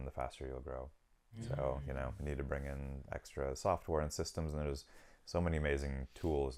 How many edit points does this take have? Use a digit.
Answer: 0